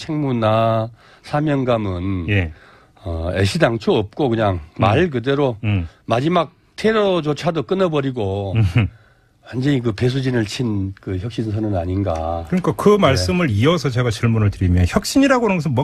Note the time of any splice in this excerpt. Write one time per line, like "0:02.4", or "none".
none